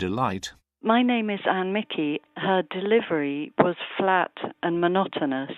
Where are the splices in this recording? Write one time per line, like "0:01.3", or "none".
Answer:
0:01.0